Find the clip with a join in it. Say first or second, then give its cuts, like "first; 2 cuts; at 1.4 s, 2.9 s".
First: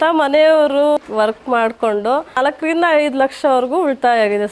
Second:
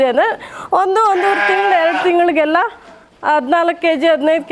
first; 2 cuts; at 1.0 s, 2.4 s